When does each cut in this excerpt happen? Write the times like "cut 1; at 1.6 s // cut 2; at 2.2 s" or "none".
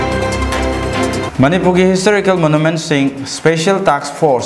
none